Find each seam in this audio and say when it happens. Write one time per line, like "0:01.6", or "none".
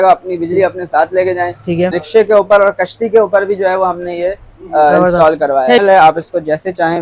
0:02.0
0:05.8